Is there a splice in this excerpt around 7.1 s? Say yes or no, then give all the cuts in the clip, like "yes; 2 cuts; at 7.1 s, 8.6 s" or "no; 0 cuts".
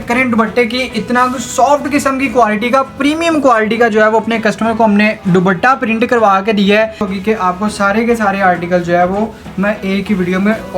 yes; 1 cut; at 7.1 s